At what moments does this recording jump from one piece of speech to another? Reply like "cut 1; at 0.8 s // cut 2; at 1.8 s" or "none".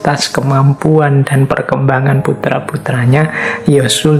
none